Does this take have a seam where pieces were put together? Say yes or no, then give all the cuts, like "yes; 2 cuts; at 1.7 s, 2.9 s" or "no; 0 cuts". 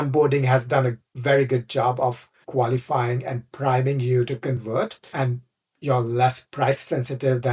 yes; 3 cuts; at 1.1 s, 2.3 s, 5.1 s